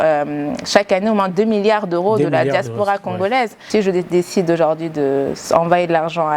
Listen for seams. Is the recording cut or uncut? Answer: cut